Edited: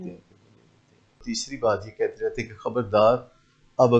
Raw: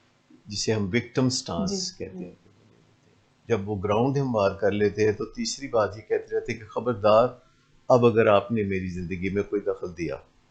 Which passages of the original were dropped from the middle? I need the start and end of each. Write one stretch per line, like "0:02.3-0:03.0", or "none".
0:03.3-0:05.3

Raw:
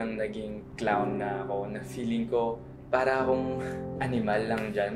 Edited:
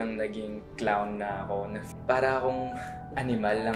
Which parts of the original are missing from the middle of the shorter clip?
0:01.9-0:02.7

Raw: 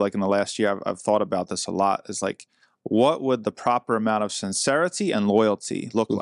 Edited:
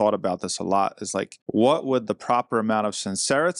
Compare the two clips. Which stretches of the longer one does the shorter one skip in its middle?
0:02.4-0:02.7

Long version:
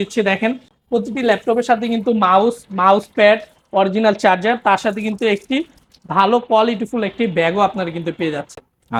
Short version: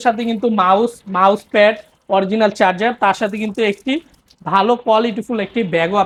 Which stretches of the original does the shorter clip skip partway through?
none

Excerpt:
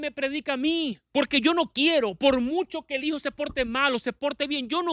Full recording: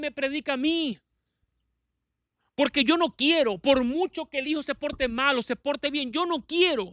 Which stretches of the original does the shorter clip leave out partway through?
0:01.0-0:02.5

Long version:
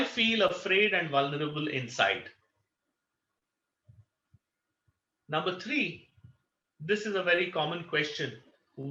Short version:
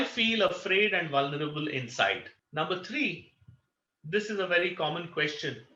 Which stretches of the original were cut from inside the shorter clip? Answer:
0:02.4-0:05.1

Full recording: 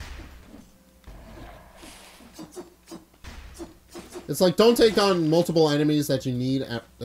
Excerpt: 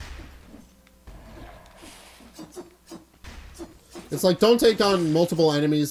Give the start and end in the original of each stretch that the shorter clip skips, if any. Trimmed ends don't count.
0:04.1-0:04.2

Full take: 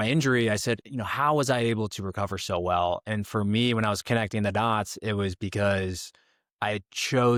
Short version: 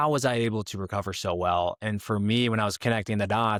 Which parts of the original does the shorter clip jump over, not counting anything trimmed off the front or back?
none

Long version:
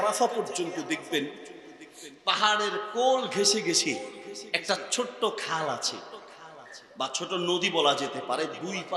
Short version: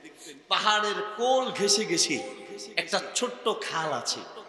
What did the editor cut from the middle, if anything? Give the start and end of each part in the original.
none

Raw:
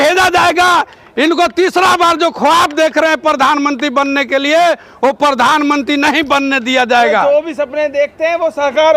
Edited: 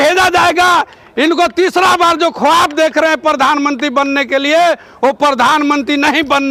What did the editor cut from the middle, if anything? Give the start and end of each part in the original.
none

